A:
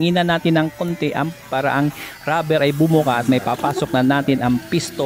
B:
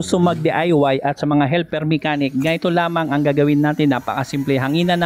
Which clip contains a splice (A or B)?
A